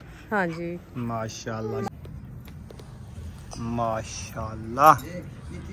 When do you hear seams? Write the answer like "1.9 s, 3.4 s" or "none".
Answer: 1.9 s